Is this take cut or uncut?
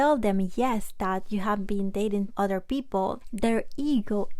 cut